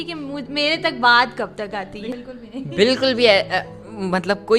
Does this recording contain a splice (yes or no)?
yes